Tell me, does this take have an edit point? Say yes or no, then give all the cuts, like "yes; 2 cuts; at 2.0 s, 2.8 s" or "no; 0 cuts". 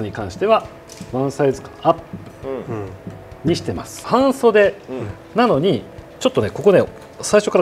yes; 1 cut; at 4.0 s